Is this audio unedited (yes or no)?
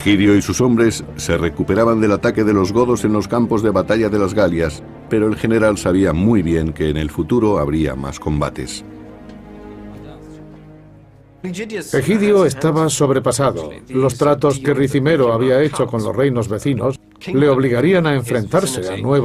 no